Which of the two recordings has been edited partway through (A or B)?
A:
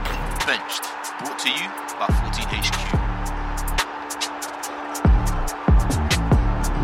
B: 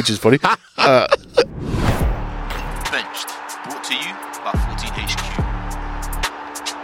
B